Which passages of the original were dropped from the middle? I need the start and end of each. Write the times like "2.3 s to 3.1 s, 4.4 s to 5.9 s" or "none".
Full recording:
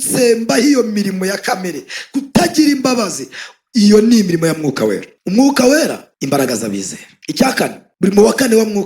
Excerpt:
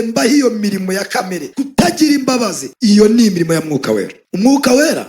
1.8 s to 2.0 s, 3.2 s to 3.6 s